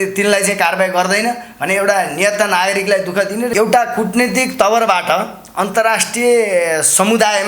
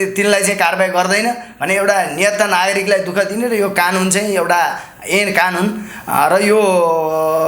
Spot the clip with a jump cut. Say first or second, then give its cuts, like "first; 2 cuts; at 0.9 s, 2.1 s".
first; 1 cut; at 3.5 s